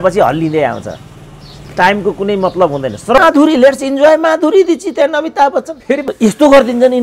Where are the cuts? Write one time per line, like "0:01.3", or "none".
0:03.2
0:06.0